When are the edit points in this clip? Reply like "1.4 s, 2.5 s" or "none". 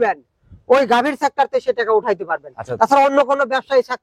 none